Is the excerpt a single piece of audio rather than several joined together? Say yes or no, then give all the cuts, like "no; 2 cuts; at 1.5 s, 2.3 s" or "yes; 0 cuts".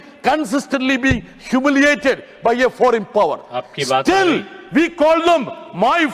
yes; 0 cuts